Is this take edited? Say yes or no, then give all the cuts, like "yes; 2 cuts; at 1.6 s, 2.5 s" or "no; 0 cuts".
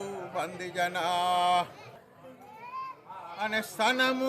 yes; 1 cut; at 2.0 s